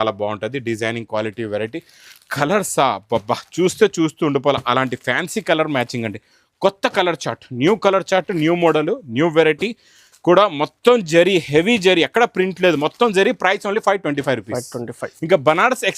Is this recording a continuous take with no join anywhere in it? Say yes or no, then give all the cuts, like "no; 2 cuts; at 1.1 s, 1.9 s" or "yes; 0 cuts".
yes; 0 cuts